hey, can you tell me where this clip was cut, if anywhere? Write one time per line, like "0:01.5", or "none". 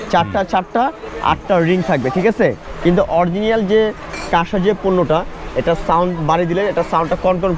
0:02.7